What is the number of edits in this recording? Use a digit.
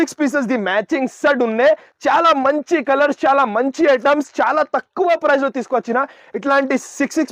0